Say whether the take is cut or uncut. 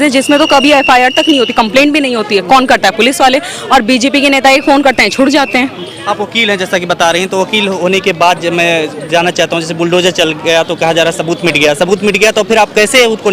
uncut